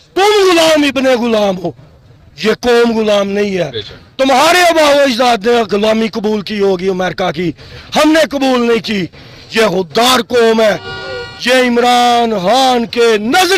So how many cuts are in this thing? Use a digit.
0